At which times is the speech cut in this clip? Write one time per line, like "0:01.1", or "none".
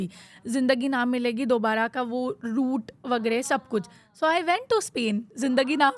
none